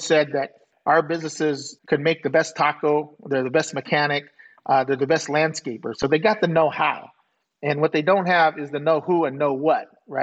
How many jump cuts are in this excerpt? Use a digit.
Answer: 1